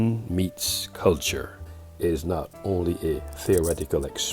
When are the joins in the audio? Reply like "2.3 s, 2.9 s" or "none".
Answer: 1.6 s